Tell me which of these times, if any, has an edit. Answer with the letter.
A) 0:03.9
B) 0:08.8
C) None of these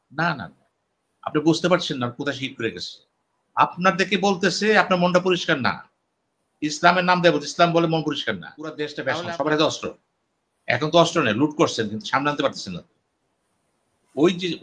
B